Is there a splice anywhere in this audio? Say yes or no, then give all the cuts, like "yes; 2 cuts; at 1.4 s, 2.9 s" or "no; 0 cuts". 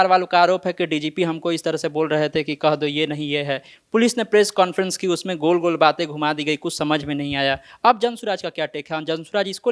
no; 0 cuts